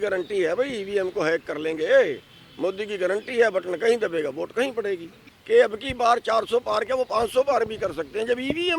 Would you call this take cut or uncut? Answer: cut